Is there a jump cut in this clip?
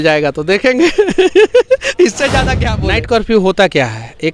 yes; 1 cut; at 2.6 s

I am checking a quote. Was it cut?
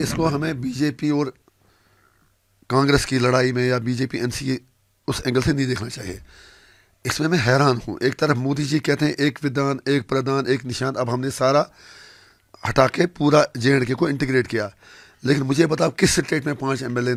no; 0 cuts

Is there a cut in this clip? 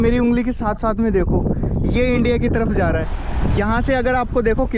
yes; 1 cut; at 3.1 s

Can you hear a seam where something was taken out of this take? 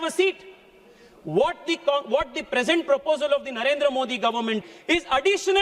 yes; 1 cut; at 4.6 s

